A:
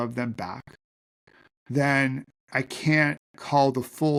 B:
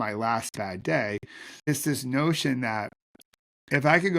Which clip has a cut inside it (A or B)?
B